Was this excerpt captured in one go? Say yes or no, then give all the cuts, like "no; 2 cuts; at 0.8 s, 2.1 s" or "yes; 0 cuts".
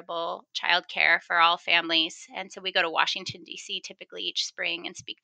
yes; 0 cuts